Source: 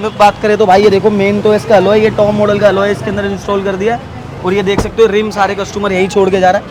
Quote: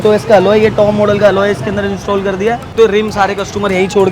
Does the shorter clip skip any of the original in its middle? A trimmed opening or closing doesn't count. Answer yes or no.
yes